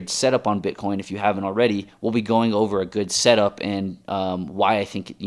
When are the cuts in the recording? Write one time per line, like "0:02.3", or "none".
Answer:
0:01.9